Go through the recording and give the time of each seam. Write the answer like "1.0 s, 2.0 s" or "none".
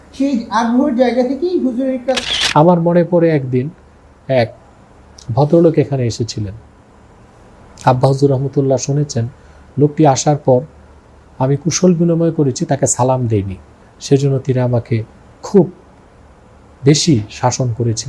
2.2 s